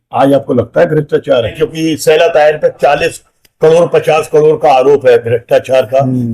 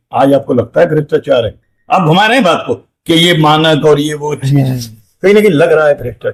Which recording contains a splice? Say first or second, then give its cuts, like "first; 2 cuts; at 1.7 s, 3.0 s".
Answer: first; 1 cut; at 1.5 s